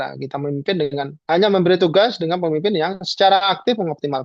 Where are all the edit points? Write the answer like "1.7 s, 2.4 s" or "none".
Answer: none